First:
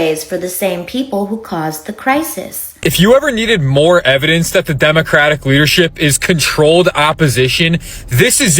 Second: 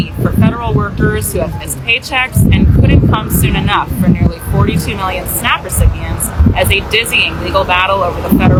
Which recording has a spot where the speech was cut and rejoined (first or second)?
first